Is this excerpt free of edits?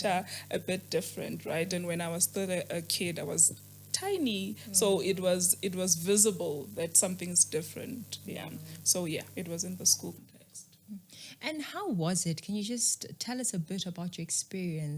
yes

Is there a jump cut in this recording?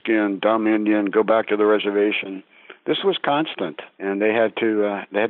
yes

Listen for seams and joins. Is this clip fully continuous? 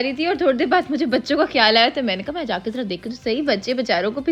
yes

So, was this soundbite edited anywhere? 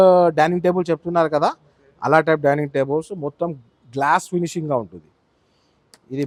no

